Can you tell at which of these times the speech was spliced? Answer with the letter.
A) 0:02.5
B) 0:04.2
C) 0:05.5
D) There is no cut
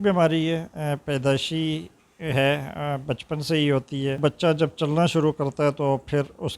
B